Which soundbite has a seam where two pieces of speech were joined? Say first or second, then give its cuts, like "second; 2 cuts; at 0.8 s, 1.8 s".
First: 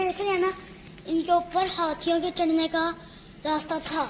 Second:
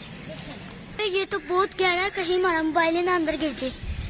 second; 1 cut; at 1.0 s